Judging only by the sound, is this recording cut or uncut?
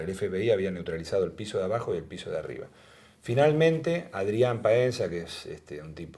uncut